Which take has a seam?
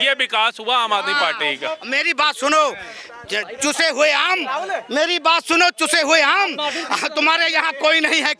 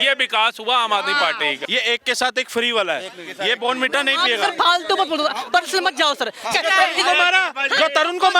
second; 2 cuts; at 1.6 s, 6.5 s

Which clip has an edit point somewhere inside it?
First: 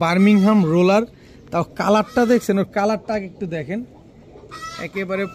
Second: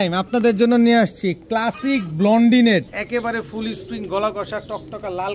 second; 1 cut; at 3.0 s

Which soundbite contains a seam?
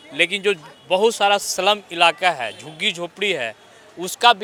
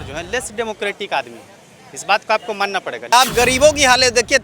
second; 1 cut; at 3.1 s

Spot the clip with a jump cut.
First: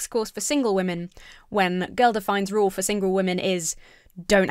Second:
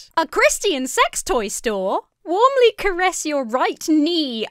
second; 1 cut; at 2.1 s

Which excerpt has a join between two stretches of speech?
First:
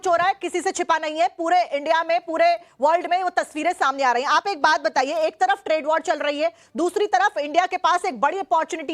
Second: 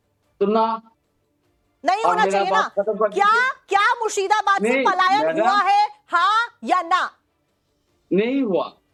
first; 1 cut; at 6.0 s

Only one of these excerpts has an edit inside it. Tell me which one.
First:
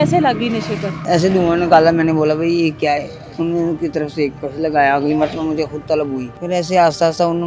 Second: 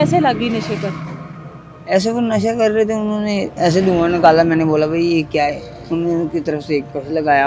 first; 2 cuts; at 1.0 s, 6.3 s

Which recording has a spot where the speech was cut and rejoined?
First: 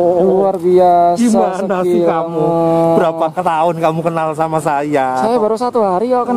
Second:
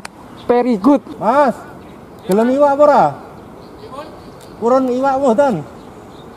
second; 1 cut; at 1.1 s

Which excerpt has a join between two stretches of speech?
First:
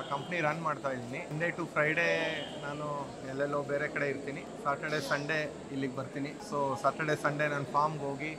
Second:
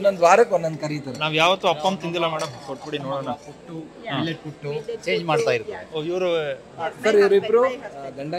first; 2 cuts; at 1.3 s, 6.4 s

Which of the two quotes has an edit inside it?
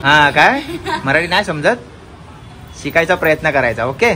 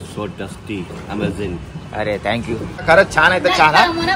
second; 1 cut; at 2.8 s

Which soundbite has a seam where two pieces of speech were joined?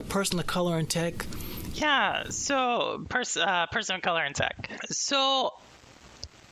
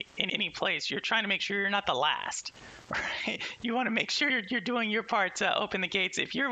first; 1 cut; at 1.6 s

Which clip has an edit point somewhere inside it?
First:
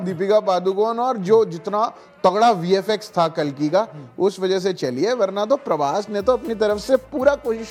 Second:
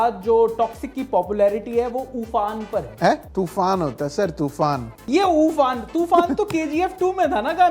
second; 2 cuts; at 3.3 s, 5.0 s

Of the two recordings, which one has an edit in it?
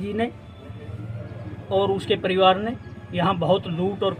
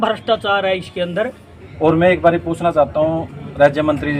second; 1 cut; at 1.5 s

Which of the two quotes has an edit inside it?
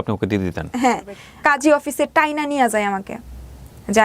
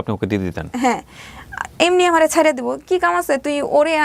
first; 1 cut; at 1.2 s

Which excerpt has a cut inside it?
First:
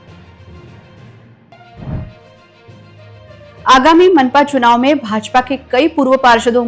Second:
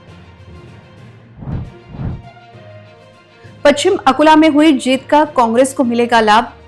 first; 1 cut; at 1.2 s

